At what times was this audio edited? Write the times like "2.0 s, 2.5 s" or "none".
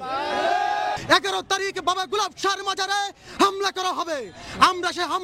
1.0 s

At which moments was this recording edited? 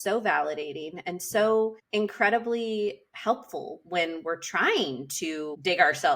none

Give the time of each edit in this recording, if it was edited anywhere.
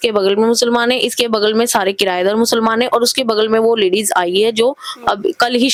none

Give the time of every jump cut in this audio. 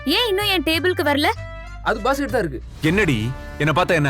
2.6 s

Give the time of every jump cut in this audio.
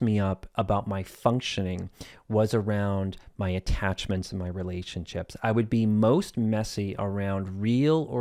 none

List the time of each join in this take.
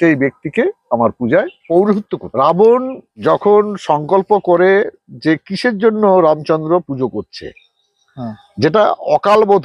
1.6 s, 2.3 s, 3.0 s

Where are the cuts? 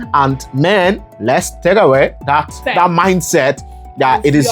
1.1 s, 2.6 s

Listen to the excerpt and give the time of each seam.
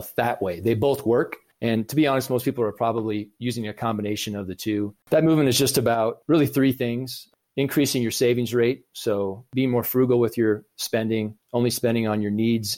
1.4 s, 5.0 s, 11.4 s

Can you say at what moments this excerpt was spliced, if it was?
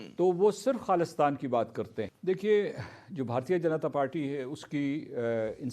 2.1 s

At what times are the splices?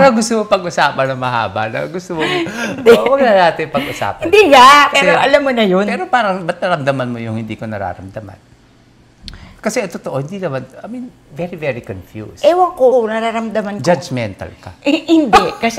none

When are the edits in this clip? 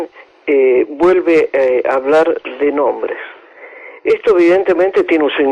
3.9 s

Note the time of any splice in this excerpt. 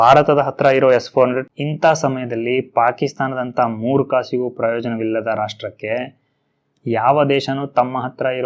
1.4 s

